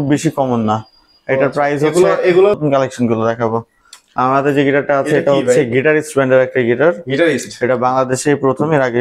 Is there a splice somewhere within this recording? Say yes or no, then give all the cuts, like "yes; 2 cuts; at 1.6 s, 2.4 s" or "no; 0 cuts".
yes; 1 cut; at 2.6 s